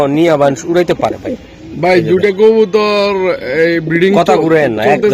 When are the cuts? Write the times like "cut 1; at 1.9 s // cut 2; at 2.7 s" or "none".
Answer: none